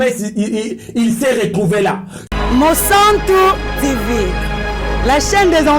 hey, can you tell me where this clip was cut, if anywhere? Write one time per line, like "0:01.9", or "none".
0:02.1

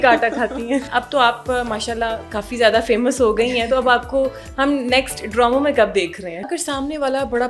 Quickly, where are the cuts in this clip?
0:00.9
0:06.4

